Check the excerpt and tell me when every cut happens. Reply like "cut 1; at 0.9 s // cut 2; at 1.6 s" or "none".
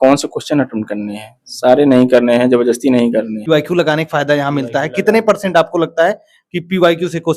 cut 1; at 3.4 s